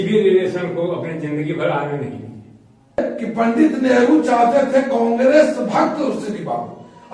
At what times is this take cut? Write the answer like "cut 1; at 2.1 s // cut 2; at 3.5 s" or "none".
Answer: cut 1; at 3.0 s